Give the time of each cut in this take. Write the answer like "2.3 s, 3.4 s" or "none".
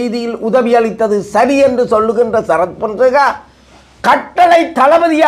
none